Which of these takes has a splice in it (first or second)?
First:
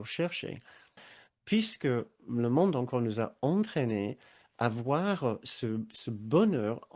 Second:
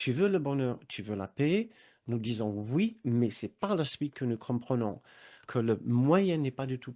first